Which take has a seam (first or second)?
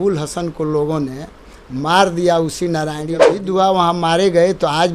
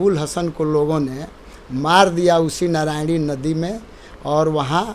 first